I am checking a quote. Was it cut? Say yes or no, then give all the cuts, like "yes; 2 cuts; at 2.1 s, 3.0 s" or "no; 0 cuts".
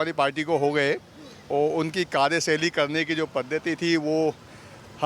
no; 0 cuts